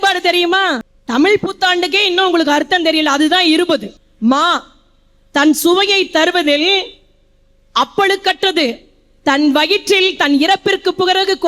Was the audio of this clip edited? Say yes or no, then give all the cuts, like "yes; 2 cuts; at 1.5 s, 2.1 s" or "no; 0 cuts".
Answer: yes; 2 cuts; at 0.9 s, 4.0 s